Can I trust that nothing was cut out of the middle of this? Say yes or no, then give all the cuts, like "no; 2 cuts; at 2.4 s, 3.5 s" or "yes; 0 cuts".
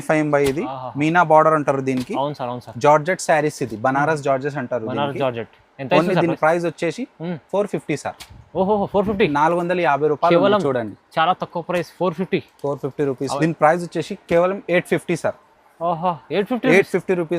no; 1 cut; at 13.3 s